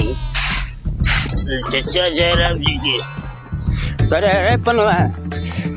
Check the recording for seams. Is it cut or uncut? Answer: uncut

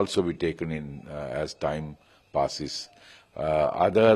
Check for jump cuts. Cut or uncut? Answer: uncut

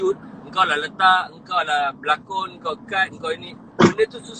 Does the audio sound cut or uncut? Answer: uncut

